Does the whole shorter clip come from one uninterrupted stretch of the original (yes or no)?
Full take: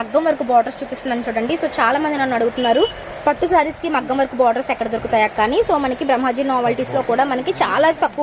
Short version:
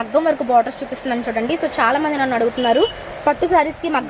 yes